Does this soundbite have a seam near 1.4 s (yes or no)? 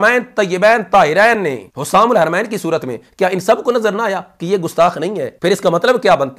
yes